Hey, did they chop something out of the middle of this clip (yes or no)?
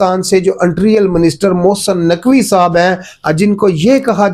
no